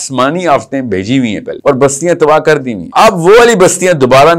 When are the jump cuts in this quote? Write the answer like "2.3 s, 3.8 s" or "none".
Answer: 1.5 s, 2.8 s